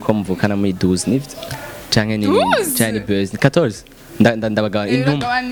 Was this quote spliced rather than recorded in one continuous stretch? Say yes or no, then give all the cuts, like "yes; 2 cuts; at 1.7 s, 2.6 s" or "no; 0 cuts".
no; 0 cuts